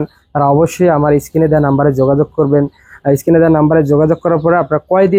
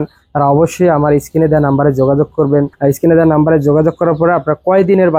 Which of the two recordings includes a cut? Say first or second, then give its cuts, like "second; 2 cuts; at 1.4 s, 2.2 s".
second; 1 cut; at 2.7 s